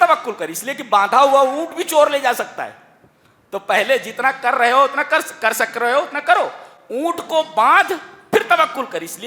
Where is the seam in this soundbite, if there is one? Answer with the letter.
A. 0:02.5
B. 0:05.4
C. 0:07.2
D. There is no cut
D